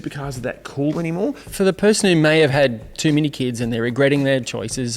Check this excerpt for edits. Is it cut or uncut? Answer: cut